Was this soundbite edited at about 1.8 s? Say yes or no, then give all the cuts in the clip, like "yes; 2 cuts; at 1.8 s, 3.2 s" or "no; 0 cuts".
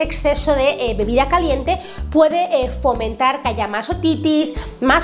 no; 0 cuts